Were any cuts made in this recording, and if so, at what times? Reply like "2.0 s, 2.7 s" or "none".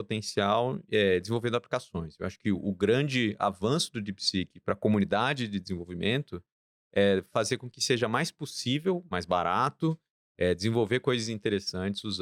none